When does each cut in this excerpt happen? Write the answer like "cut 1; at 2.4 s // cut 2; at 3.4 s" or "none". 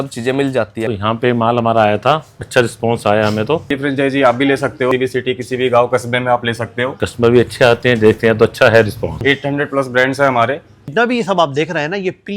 cut 1; at 0.9 s // cut 2; at 2.3 s // cut 3; at 3.7 s // cut 4; at 4.9 s // cut 5; at 7.0 s // cut 6; at 9.2 s // cut 7; at 10.9 s

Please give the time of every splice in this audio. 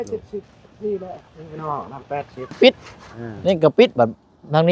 cut 1; at 2.5 s

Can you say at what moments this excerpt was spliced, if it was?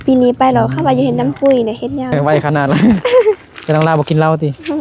cut 1; at 2.1 s

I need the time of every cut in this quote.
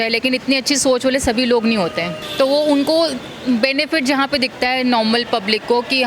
cut 1; at 2.2 s

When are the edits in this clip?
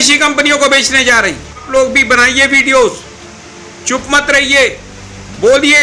cut 1; at 1.7 s

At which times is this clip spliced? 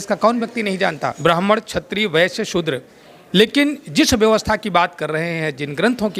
cut 1; at 1.2 s

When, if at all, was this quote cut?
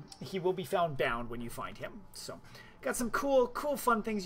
none

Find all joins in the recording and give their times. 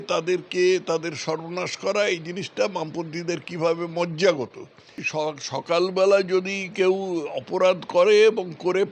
cut 1; at 5.0 s

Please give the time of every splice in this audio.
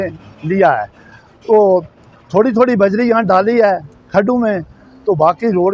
none

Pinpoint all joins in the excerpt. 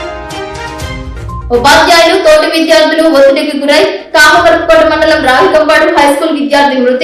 none

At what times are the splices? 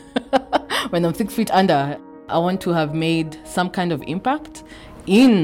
cut 1; at 1.9 s

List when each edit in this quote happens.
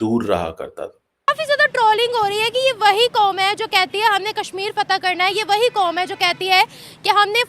cut 1; at 1.3 s

